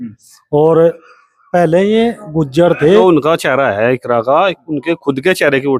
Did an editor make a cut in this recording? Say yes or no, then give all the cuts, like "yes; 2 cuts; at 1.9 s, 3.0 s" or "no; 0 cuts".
yes; 1 cut; at 3.0 s